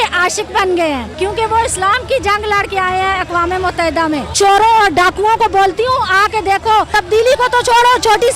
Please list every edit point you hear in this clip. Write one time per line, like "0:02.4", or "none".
0:01.1
0:04.3
0:06.9

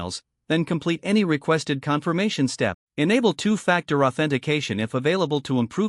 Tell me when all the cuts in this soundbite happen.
0:02.8

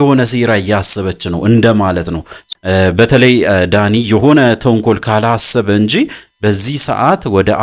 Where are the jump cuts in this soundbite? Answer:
0:02.5

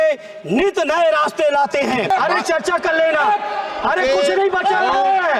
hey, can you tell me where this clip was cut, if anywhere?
0:02.1

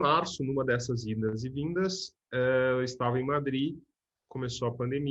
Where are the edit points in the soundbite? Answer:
none

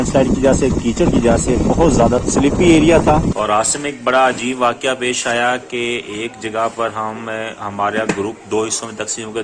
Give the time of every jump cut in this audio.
0:02.2
0:03.3

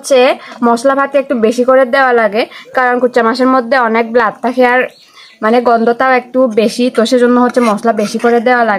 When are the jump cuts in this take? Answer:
none

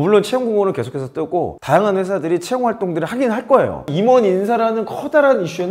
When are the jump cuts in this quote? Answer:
0:03.9

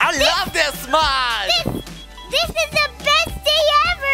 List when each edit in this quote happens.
none

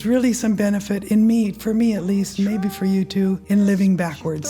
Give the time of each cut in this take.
0:03.4

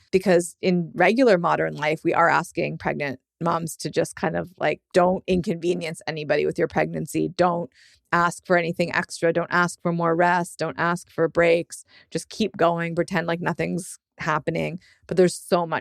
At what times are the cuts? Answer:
0:04.8

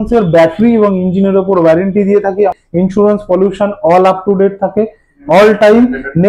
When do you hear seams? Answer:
0:02.5

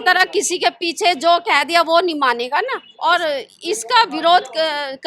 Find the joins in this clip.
0:02.8

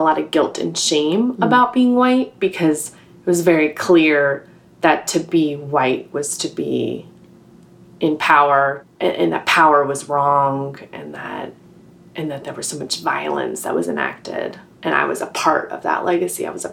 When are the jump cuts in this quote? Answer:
0:08.8

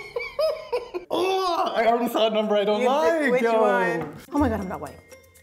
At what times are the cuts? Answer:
0:01.0
0:04.2

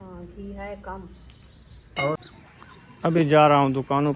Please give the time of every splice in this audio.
0:02.2

